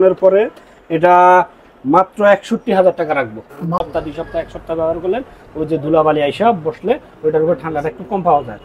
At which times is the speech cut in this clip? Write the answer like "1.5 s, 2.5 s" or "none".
3.8 s